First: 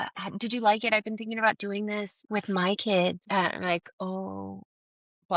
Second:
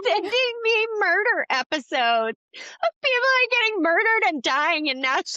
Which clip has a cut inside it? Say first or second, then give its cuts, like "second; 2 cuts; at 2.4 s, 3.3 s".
first; 1 cut; at 3.2 s